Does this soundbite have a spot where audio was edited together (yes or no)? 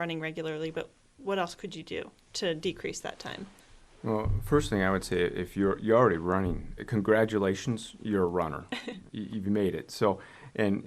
no